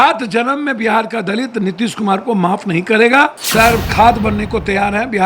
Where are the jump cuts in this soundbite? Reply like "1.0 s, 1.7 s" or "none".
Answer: 3.4 s